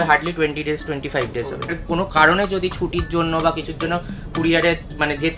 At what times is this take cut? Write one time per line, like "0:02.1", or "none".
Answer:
0:01.7